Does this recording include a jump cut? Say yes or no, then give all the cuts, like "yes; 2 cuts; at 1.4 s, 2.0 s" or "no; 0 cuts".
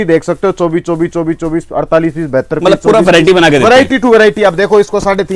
no; 0 cuts